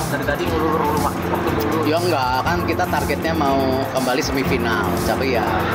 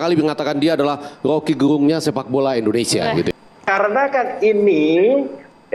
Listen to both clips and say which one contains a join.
second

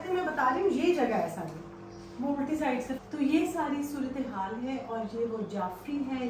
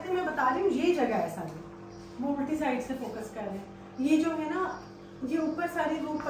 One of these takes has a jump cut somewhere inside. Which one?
first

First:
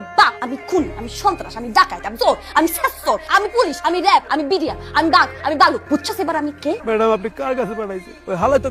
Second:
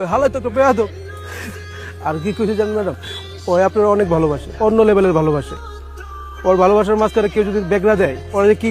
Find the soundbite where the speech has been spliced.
first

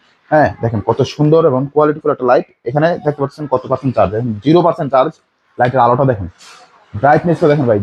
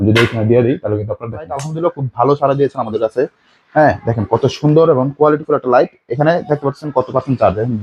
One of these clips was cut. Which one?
second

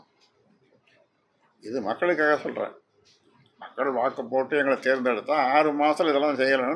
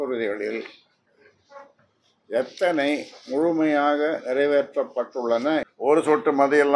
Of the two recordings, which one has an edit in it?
second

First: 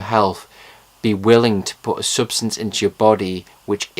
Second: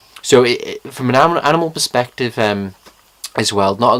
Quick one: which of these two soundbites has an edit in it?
first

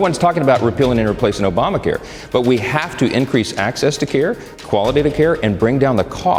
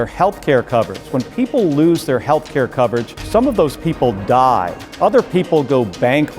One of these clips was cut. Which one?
second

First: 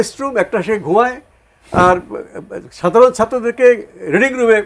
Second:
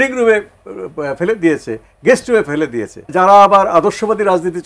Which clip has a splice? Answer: second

